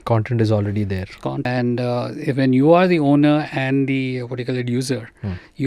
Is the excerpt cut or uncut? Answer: cut